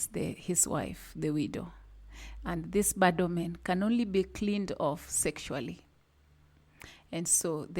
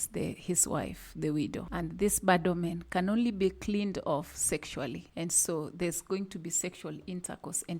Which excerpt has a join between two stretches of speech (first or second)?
second